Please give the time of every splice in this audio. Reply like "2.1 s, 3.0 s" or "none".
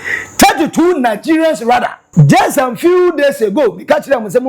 2.0 s